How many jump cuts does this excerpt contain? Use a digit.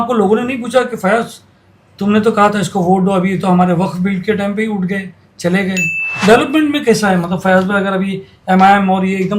1